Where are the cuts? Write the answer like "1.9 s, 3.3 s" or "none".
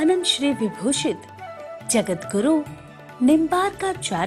1.0 s